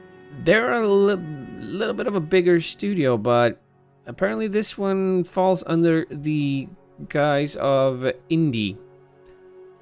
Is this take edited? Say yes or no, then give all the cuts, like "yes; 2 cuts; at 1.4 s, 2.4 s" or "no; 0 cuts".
no; 0 cuts